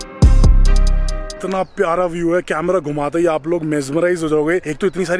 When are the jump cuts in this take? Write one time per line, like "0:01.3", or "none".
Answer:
0:01.4